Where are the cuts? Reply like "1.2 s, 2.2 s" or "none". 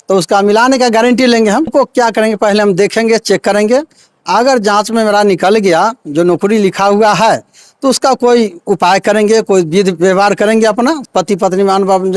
1.7 s, 11.0 s